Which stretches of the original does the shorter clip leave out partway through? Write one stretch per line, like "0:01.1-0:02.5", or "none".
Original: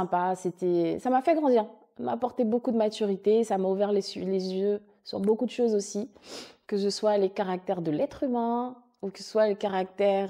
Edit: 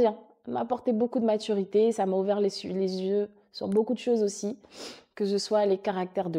none